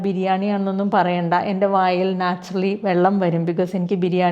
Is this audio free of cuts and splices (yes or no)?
yes